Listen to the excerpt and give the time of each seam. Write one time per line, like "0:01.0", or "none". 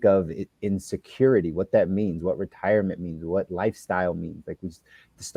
none